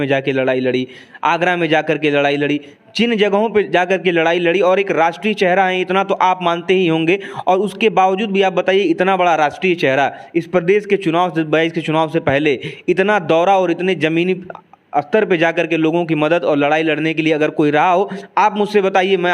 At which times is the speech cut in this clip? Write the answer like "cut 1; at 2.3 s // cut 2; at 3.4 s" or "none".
none